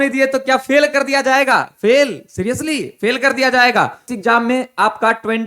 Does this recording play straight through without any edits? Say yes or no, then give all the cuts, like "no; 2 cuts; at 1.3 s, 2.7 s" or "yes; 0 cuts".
no; 1 cut; at 4.0 s